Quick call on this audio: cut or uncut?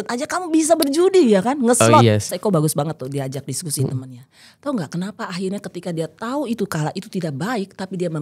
cut